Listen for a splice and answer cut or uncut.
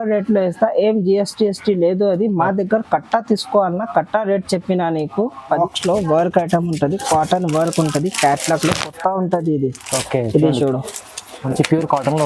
cut